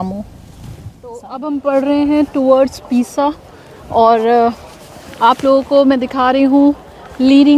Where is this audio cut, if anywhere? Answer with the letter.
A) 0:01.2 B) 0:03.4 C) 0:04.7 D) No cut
A